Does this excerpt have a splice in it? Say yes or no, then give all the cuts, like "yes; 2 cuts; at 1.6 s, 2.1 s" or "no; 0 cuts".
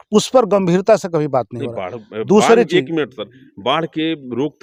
no; 0 cuts